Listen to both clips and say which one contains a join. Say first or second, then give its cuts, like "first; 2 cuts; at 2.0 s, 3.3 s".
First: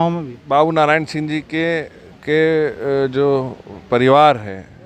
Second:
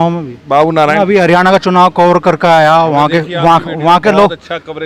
second; 1 cut; at 0.9 s